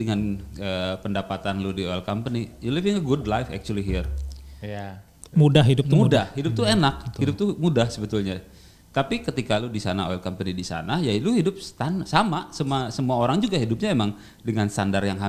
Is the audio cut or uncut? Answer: uncut